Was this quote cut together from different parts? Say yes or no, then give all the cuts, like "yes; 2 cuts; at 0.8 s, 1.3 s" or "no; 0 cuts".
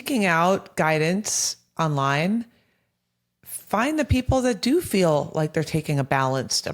no; 0 cuts